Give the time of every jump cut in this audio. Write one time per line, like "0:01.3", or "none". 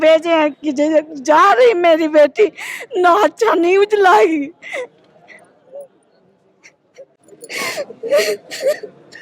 0:07.2